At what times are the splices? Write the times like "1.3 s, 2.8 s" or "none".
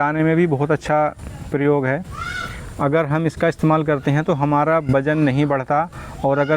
none